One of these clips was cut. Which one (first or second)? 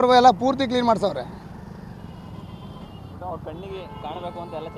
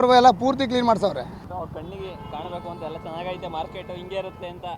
second